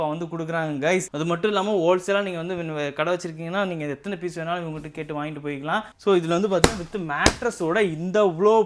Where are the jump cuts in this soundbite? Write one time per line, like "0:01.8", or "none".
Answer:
0:01.1
0:05.9